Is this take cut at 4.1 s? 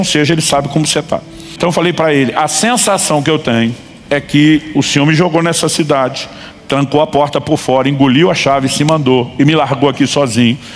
no; 1 cut; at 1.6 s

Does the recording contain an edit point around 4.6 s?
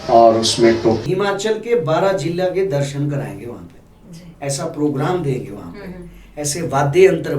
no; 1 cut; at 1.0 s

